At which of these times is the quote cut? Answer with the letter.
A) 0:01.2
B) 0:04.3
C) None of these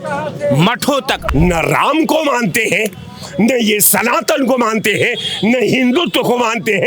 A